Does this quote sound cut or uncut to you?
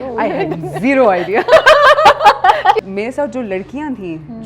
cut